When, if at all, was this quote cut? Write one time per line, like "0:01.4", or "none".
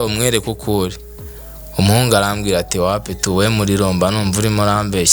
none